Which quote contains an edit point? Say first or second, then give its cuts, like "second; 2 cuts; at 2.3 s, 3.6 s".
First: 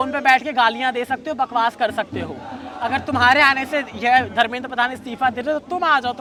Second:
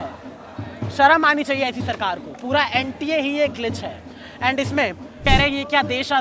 second; 1 cut; at 5.2 s